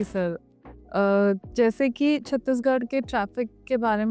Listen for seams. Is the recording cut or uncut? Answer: uncut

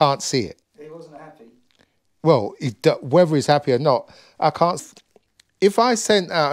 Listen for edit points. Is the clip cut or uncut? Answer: cut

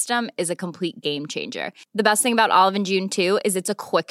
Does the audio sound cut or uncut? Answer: uncut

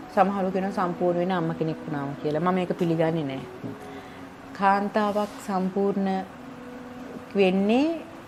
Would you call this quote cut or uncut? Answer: uncut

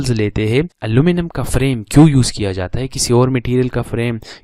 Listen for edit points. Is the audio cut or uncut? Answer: uncut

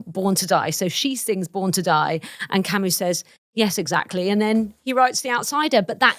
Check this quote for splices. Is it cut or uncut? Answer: uncut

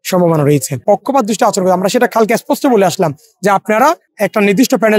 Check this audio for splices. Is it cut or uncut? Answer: cut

